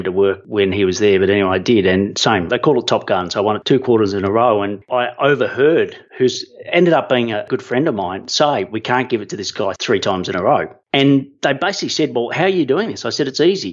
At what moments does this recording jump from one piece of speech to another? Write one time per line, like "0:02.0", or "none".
0:02.5
0:03.6
0:04.8
0:06.0
0:07.4
0:10.8

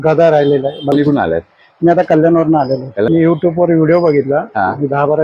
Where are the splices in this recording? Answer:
0:00.9
0:03.1

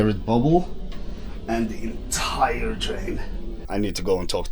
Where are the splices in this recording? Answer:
0:03.5

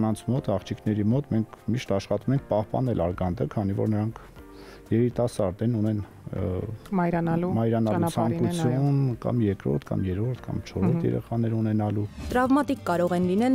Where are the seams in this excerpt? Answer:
0:12.2

